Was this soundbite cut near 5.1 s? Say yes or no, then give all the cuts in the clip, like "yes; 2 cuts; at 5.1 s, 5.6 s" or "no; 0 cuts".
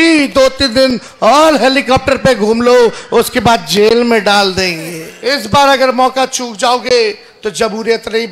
yes; 1 cut; at 5.1 s